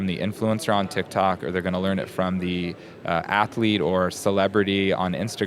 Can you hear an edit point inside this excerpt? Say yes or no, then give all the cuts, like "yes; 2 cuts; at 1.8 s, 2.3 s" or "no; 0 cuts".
no; 0 cuts